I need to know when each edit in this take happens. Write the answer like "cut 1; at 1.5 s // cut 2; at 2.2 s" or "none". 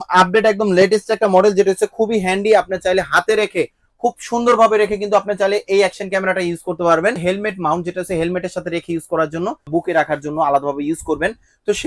cut 1; at 7.2 s // cut 2; at 9.7 s